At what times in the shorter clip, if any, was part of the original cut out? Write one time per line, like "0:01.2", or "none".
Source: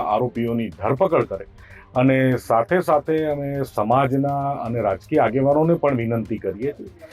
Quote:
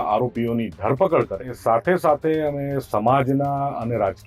0:01.6